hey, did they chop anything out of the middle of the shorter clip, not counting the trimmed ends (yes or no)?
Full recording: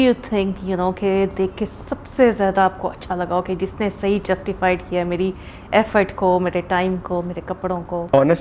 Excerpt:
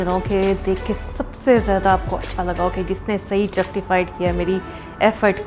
no